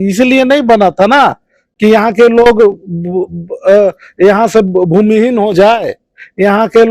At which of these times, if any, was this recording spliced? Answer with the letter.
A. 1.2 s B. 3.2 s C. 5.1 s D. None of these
D